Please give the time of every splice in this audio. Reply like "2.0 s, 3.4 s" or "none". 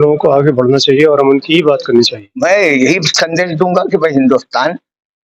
2.2 s